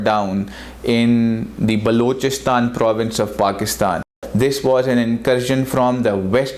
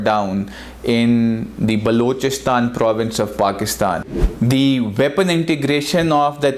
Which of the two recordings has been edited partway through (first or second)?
second